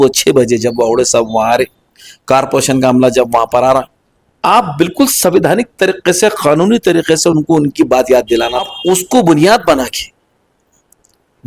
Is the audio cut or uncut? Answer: cut